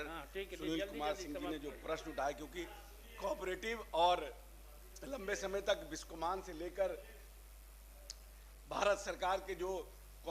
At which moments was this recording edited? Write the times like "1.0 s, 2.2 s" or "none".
none

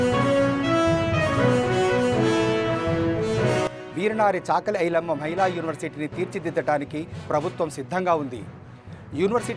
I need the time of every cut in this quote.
none

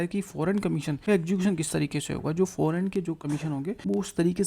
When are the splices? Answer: 0.9 s, 3.3 s

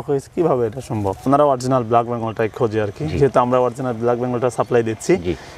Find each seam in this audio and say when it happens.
1.2 s

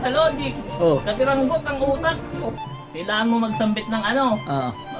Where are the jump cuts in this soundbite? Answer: 2.5 s

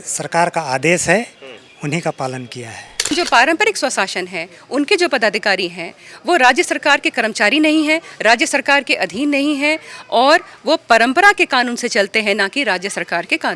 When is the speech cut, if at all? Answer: 3.1 s

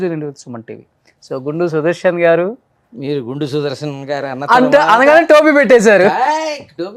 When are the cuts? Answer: none

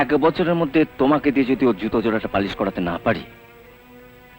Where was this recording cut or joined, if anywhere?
none

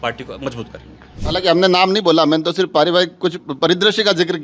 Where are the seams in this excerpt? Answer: 1.1 s

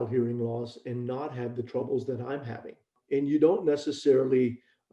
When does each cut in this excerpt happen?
3.0 s

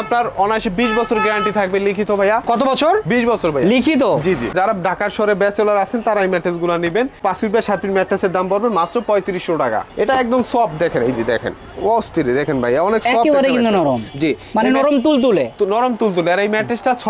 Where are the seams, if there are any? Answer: 4.5 s, 9.9 s

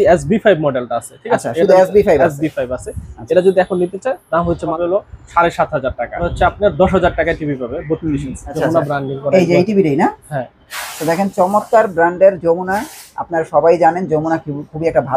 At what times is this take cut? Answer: 4.7 s, 6.2 s, 8.6 s

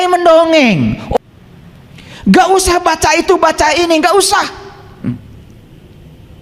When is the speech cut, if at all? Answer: 1.2 s

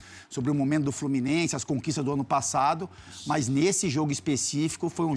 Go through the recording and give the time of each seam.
none

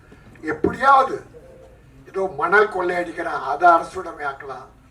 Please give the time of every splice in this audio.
none

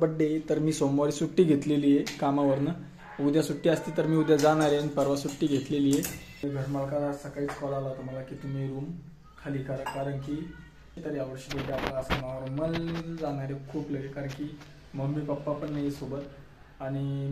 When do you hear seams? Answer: 6.5 s, 11.0 s

